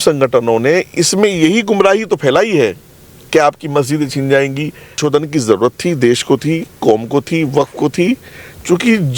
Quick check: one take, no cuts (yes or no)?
no